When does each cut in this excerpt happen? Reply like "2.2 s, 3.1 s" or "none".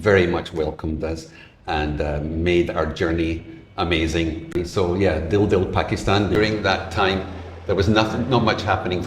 4.5 s, 6.3 s